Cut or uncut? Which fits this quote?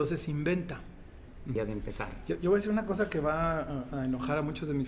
cut